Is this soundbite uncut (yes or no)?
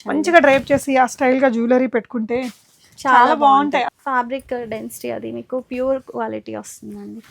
no